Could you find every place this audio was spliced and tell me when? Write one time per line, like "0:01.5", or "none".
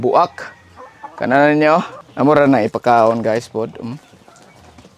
0:02.0